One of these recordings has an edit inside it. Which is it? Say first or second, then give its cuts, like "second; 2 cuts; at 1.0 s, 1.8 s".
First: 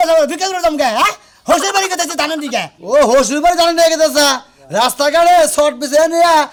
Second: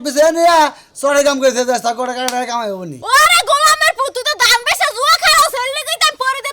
second; 1 cut; at 3.0 s